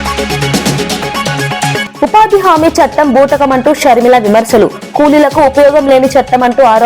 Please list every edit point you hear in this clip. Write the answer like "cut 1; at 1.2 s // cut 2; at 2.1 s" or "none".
cut 1; at 1.9 s